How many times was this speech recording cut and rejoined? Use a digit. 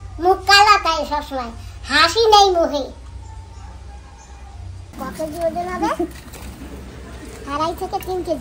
1